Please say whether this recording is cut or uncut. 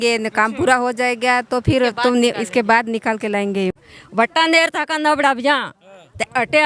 cut